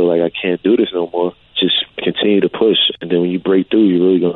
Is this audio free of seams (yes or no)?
no